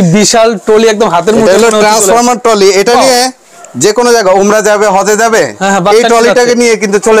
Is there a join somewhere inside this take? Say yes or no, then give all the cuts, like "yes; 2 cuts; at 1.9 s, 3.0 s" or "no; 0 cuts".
no; 0 cuts